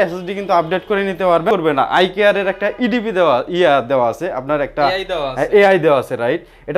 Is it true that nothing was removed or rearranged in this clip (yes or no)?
no